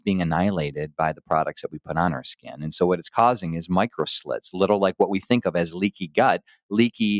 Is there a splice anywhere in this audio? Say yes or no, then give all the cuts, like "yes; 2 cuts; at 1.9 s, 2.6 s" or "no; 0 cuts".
no; 0 cuts